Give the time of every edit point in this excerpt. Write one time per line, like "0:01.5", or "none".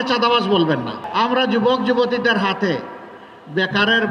0:01.0

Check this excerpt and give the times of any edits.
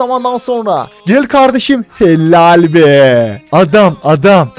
0:00.9
0:03.4

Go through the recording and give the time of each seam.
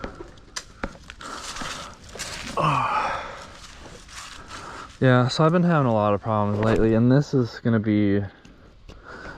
none

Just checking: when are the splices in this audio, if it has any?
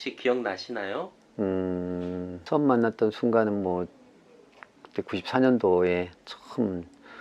0:02.4

